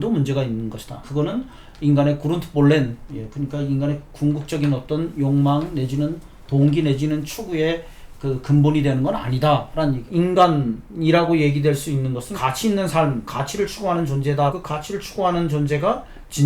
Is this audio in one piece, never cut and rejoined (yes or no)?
no